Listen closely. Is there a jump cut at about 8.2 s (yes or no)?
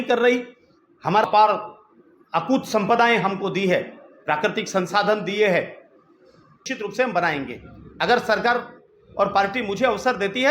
no